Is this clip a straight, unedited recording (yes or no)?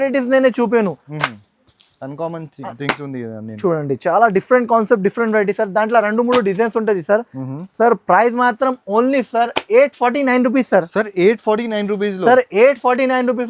yes